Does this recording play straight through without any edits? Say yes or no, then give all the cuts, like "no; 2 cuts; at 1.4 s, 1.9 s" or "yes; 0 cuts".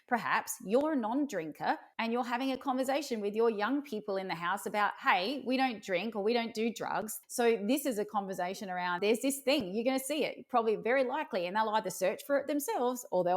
no; 3 cuts; at 1.9 s, 7.1 s, 9.0 s